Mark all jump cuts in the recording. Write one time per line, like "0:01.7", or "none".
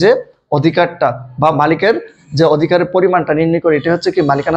none